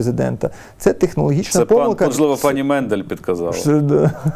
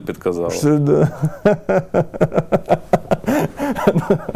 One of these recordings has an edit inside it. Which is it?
first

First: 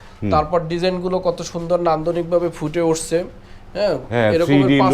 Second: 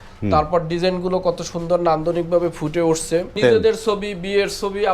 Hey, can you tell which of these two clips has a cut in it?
second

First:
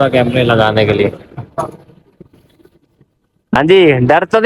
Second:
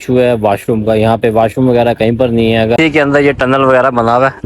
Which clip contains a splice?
second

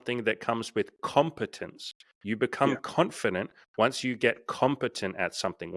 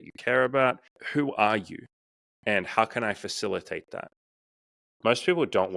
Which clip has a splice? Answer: second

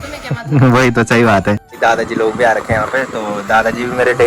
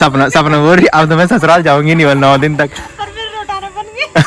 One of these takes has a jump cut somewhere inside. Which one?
first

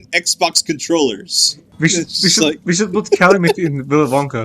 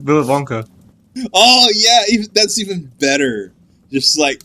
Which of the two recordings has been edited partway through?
first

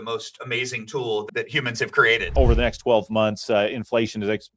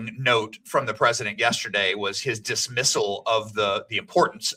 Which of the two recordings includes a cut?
first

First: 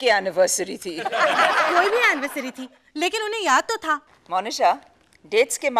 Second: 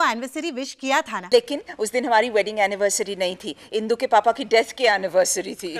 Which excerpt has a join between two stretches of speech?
second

